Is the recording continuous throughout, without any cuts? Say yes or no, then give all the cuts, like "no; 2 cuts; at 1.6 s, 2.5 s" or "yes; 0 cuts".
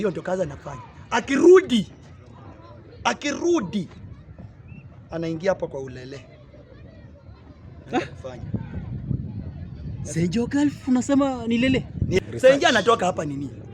no; 1 cut; at 12.2 s